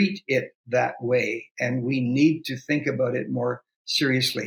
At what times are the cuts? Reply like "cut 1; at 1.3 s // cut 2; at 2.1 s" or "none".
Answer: none